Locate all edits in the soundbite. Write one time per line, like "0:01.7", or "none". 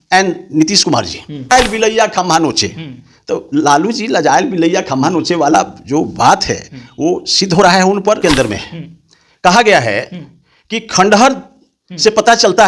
0:01.5
0:08.2